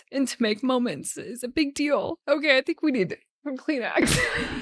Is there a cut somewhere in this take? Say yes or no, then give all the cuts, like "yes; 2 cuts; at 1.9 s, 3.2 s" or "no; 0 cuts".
yes; 1 cut; at 2.2 s